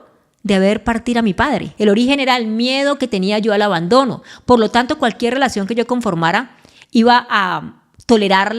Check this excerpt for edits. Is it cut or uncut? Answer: cut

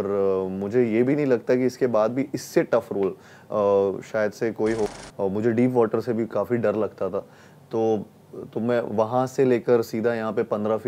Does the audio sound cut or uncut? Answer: cut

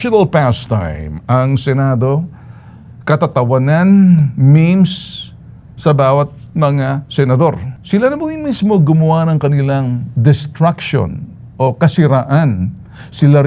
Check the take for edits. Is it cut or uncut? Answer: uncut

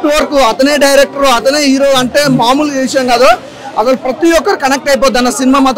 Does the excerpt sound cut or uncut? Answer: uncut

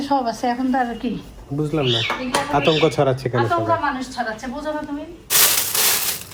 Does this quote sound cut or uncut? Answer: uncut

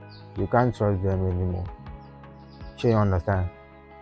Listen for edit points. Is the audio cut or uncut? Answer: uncut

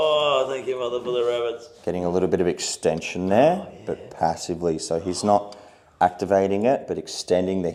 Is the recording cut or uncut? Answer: uncut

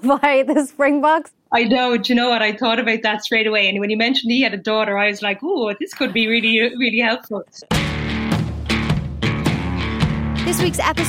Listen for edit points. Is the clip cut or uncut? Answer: cut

